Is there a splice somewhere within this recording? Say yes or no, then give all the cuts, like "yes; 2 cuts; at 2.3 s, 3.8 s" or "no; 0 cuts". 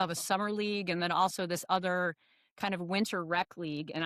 no; 0 cuts